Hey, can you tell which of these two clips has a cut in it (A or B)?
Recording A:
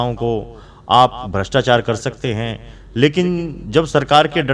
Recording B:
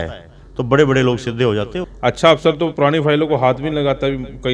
B